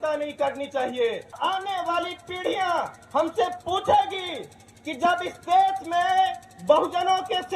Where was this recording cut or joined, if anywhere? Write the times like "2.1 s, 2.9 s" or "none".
1.3 s